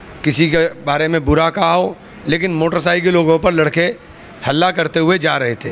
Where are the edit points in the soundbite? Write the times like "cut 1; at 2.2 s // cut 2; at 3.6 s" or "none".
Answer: none